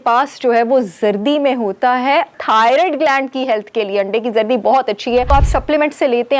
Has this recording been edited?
yes; 2 cuts; at 2.3 s, 5.3 s

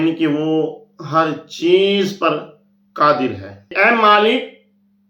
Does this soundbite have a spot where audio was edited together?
yes; 1 cut; at 3.7 s

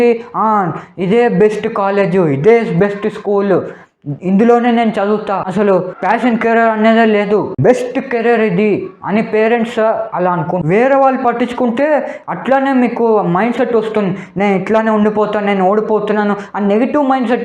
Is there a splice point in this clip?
yes; 1 cut; at 10.6 s

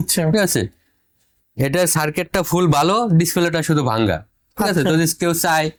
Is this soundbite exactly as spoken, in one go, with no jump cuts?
yes; 0 cuts

